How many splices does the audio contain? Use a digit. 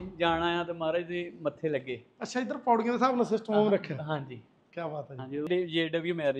1